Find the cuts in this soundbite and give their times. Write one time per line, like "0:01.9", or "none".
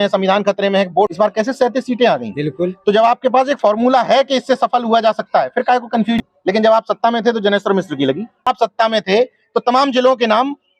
0:01.1
0:06.2
0:08.5